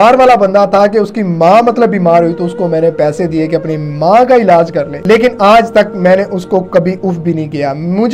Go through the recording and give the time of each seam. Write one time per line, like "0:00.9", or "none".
none

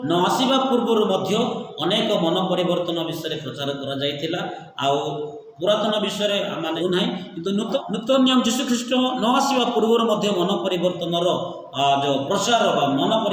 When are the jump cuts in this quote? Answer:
0:06.8
0:07.8

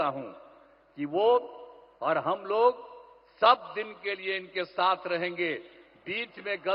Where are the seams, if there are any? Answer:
none

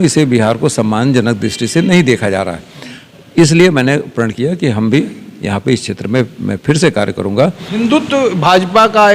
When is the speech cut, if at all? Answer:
0:07.6

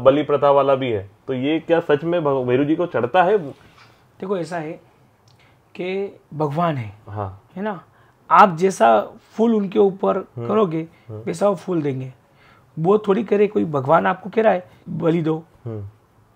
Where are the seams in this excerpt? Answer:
0:06.2
0:07.4
0:14.8

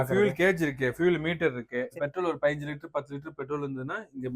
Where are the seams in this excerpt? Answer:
0:01.9

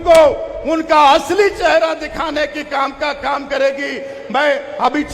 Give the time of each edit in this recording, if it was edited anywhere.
none

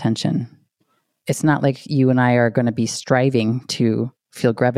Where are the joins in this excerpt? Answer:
0:01.1

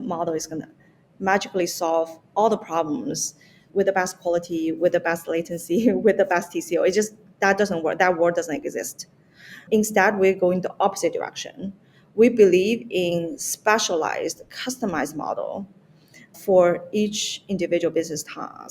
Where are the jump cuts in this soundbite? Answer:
0:03.6
0:09.6
0:16.3

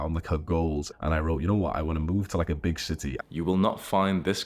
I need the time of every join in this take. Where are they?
0:00.9
0:03.2

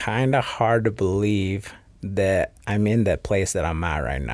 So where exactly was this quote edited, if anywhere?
0:02.6

